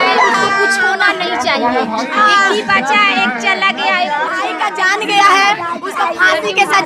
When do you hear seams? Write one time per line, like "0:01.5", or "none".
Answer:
0:04.5